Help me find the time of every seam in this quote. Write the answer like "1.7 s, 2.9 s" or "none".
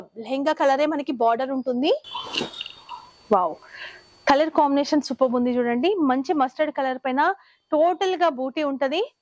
2.2 s